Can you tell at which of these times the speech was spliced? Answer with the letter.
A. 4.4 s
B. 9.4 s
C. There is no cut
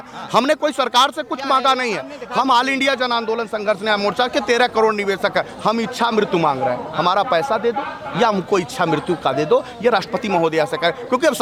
C